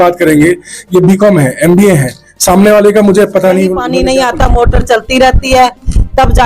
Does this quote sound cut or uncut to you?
cut